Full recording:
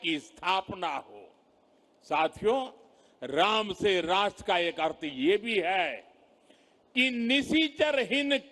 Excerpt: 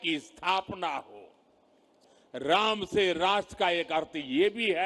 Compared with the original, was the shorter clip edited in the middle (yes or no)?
yes